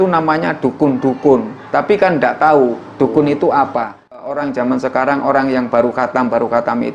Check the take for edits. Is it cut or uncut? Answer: cut